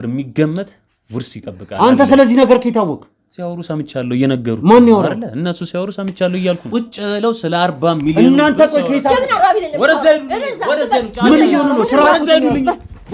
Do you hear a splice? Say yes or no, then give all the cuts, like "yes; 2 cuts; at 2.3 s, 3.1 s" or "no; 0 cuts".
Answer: yes; 1 cut; at 6.6 s